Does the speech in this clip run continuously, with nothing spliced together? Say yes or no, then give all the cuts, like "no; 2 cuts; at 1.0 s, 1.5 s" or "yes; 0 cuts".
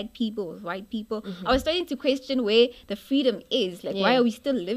yes; 0 cuts